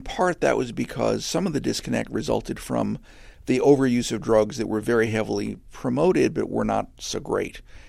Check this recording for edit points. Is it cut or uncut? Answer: uncut